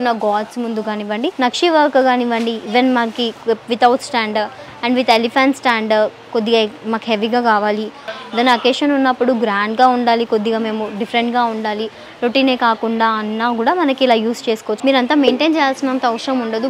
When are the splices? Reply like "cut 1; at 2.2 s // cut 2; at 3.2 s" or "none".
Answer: cut 1; at 1.3 s // cut 2; at 8.0 s // cut 3; at 14.7 s